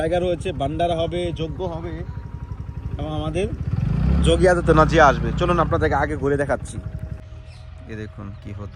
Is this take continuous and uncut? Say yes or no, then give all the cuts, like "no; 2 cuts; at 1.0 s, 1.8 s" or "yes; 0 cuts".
no; 1 cut; at 7.0 s